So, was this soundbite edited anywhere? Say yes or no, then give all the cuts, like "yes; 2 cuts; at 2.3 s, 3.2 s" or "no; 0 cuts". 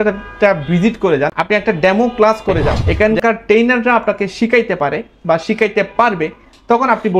yes; 2 cuts; at 1.4 s, 2.8 s